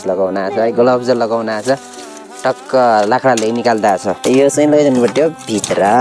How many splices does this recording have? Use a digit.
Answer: 1